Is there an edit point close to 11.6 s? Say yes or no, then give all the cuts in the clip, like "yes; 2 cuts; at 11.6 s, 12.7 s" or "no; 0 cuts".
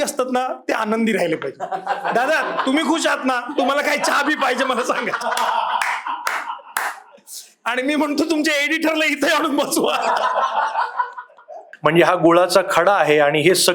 yes; 1 cut; at 11.6 s